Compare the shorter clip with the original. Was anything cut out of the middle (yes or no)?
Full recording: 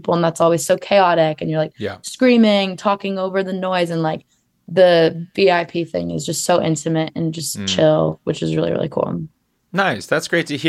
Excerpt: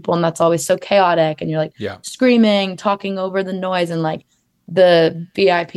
no